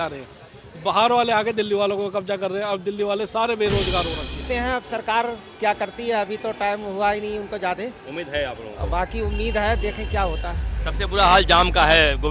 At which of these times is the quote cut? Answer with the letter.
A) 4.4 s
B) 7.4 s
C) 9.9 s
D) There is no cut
A